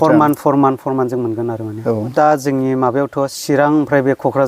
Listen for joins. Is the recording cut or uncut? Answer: cut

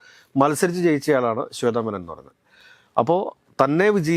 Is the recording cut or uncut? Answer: uncut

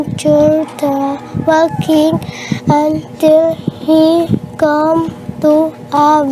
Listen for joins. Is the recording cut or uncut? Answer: uncut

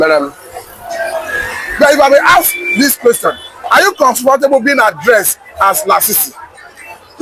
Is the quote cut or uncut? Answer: uncut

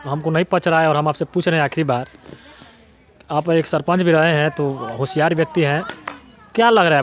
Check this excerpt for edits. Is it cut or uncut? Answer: uncut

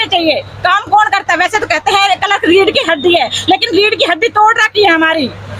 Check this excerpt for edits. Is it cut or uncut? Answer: uncut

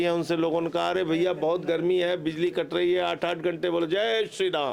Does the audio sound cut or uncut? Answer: uncut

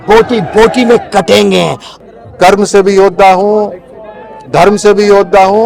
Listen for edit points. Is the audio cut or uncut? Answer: cut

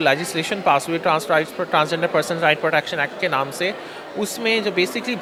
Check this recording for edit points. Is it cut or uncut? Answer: uncut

